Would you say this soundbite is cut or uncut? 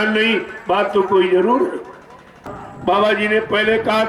cut